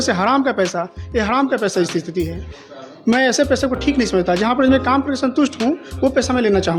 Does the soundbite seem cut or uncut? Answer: uncut